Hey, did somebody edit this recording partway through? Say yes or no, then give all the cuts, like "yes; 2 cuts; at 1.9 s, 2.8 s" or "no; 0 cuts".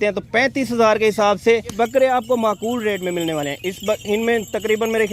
yes; 1 cut; at 1.8 s